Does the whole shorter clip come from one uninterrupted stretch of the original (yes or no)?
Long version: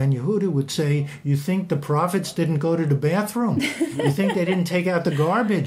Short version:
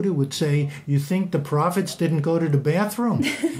yes